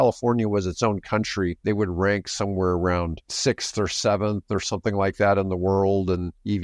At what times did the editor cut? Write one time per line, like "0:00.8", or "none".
none